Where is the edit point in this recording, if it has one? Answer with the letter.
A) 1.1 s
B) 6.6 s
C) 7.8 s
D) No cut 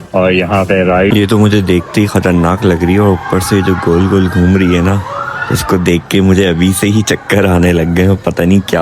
A